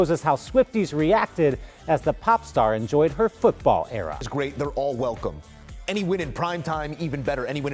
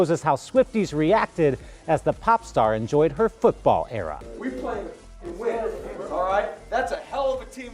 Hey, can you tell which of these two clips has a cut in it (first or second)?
second